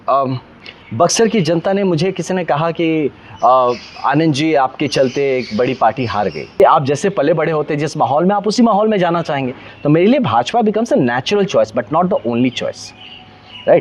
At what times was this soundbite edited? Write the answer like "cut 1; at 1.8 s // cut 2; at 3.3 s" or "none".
cut 1; at 6.4 s